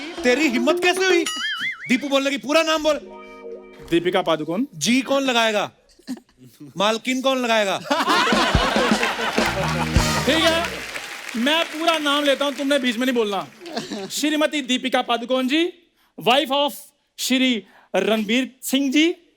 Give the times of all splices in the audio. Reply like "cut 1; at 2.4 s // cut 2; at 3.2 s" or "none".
none